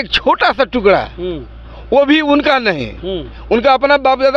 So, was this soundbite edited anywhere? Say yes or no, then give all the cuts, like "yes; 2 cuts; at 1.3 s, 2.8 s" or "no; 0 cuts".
no; 0 cuts